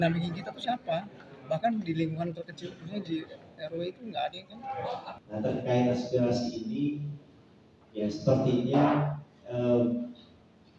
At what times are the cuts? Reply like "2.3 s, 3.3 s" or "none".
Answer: 5.2 s